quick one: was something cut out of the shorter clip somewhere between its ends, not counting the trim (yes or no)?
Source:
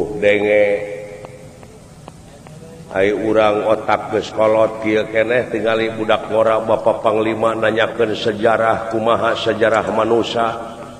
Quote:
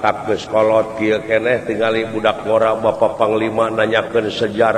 no